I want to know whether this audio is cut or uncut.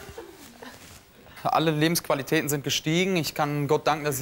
cut